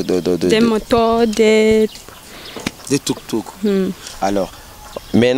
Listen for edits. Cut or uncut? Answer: uncut